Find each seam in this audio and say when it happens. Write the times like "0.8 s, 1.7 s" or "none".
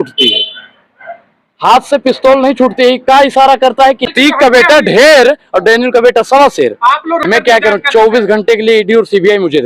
4.1 s, 7.2 s